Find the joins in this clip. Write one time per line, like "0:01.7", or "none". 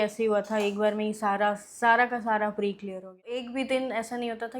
0:03.5